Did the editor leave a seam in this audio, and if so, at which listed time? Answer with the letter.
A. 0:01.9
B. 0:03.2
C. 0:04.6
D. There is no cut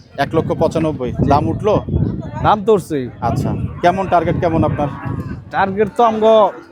D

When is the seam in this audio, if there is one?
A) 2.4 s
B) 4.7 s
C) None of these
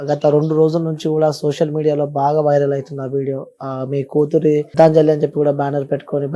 B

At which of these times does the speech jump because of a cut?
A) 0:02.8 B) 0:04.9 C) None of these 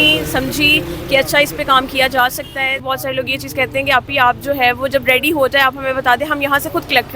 A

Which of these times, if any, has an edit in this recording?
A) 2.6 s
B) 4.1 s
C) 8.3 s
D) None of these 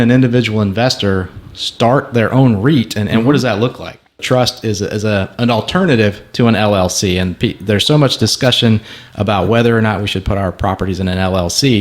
B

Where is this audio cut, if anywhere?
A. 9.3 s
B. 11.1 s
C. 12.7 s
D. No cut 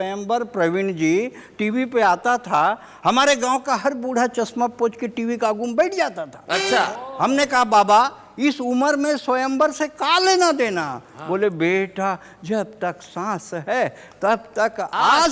D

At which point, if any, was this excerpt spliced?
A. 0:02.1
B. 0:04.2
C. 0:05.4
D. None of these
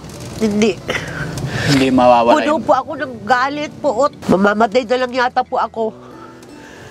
B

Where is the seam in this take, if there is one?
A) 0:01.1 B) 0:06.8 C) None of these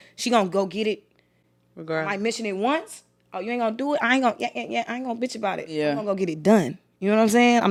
C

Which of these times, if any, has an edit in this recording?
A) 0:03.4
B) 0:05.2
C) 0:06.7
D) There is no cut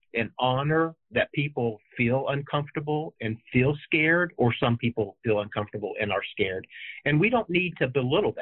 D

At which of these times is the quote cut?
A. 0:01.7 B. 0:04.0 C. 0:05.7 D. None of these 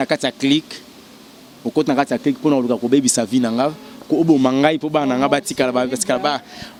D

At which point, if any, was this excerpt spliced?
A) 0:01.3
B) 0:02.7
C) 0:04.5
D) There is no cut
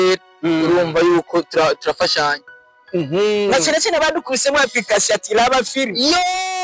B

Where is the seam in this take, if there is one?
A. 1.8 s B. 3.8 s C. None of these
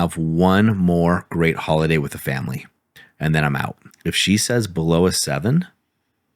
B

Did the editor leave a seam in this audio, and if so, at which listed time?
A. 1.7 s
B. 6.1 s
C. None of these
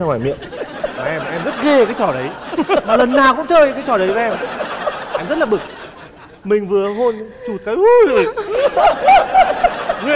C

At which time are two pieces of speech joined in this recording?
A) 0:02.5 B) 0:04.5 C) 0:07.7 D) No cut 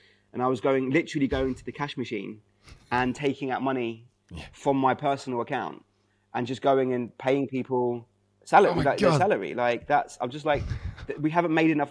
D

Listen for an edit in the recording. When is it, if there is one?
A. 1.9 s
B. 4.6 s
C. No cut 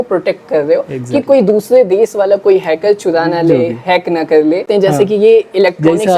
B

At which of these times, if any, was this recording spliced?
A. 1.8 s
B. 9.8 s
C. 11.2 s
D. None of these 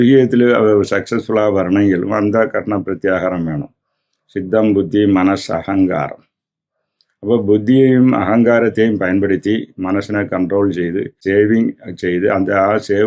C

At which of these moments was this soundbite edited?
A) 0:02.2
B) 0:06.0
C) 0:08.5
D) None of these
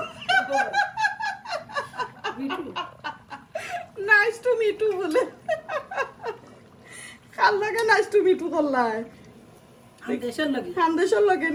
D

